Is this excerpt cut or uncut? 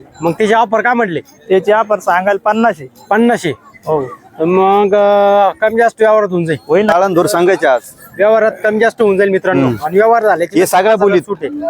cut